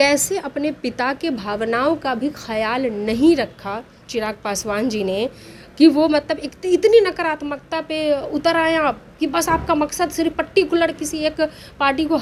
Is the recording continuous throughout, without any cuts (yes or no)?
yes